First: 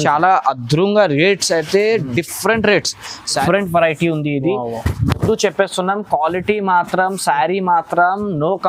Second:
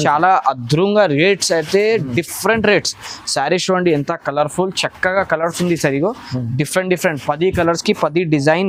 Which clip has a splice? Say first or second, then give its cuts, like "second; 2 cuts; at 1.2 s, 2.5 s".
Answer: first; 1 cut; at 3.4 s